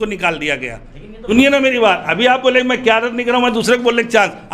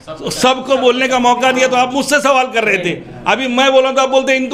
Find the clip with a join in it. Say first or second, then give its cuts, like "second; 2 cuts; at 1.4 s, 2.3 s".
first; 1 cut; at 1.3 s